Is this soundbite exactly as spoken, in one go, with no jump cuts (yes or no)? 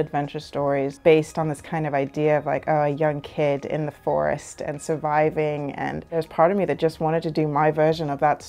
yes